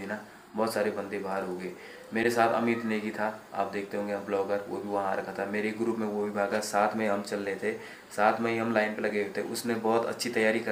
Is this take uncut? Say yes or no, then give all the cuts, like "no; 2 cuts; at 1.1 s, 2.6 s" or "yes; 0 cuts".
yes; 0 cuts